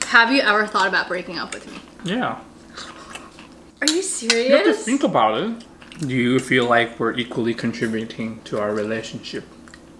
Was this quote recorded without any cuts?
no; 2 cuts; at 2.0 s, 5.7 s

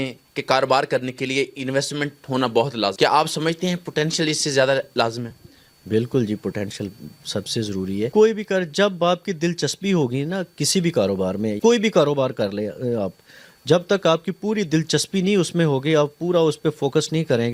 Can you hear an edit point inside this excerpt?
no; 0 cuts

